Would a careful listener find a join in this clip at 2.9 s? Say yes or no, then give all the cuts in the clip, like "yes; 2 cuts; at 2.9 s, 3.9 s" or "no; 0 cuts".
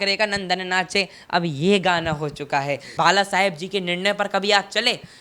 yes; 1 cut; at 2.9 s